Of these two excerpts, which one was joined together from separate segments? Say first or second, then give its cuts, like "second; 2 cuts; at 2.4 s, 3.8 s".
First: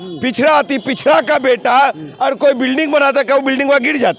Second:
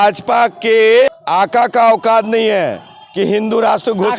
second; 1 cut; at 1.2 s